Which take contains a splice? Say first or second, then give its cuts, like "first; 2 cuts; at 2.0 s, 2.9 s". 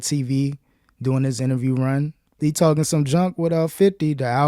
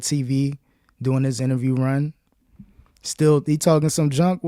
first; 1 cut; at 2.4 s